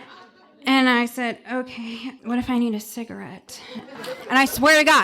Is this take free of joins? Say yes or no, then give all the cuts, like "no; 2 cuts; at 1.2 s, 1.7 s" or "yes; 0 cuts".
no; 2 cuts; at 2.1 s, 4.0 s